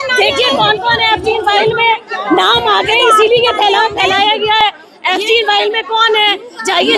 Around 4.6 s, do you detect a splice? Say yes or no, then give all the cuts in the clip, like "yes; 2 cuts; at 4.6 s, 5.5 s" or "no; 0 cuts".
no; 0 cuts